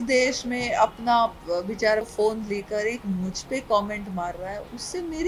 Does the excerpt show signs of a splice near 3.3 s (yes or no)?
no